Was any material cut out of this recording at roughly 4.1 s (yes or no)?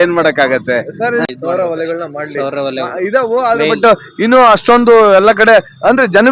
no